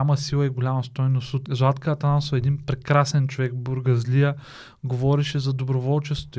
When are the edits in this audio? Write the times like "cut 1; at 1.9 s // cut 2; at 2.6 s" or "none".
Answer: cut 1; at 1.4 s